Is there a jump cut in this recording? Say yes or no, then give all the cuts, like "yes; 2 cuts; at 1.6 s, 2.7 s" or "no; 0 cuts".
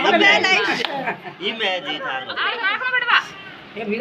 yes; 1 cut; at 2.2 s